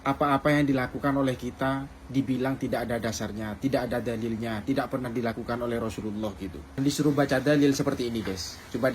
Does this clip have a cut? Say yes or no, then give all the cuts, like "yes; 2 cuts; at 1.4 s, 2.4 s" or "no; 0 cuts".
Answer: yes; 1 cut; at 6.8 s